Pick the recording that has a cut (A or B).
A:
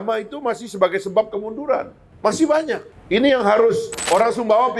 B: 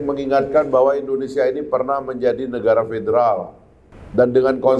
A